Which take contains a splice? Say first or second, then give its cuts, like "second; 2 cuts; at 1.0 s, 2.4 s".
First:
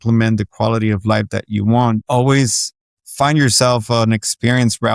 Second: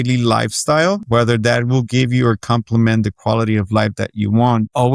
second; 1 cut; at 1.0 s